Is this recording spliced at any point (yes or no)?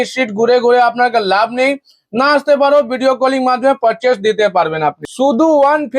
yes